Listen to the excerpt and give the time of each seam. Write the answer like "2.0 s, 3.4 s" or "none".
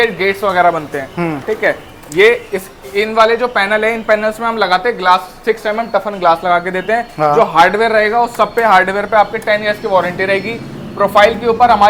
none

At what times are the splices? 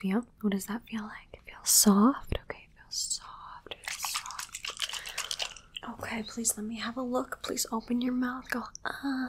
5.6 s

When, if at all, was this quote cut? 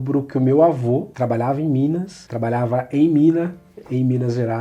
none

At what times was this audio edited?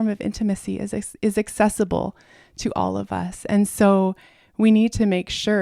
none

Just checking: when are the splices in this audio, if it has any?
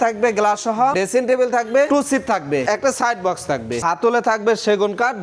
0.9 s, 2.4 s, 3.8 s

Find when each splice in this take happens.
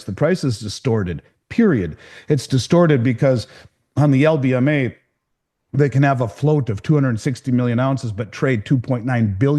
none

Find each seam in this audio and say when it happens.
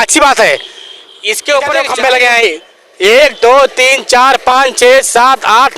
1.9 s

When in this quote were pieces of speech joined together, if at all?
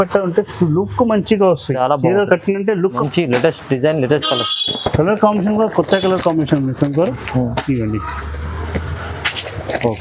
3.0 s

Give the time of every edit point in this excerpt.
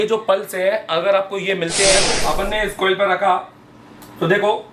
2.1 s

